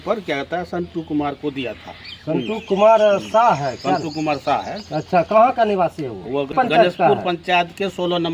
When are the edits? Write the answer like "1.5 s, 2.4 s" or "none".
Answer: 6.5 s